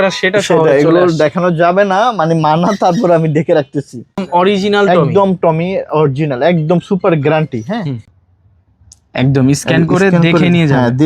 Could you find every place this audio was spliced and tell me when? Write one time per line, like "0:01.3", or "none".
0:04.2
0:08.0